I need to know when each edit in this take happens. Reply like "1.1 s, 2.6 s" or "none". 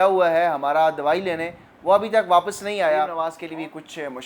3.3 s